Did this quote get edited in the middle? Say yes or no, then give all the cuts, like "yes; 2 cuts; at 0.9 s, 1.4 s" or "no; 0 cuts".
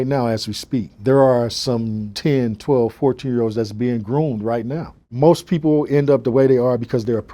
yes; 2 cuts; at 0.9 s, 2.0 s